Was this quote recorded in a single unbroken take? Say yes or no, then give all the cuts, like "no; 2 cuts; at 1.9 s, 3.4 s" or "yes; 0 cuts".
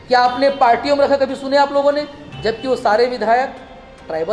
yes; 0 cuts